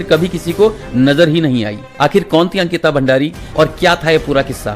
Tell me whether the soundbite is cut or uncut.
cut